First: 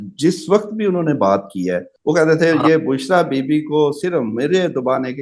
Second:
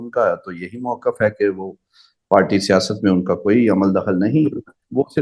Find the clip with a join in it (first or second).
first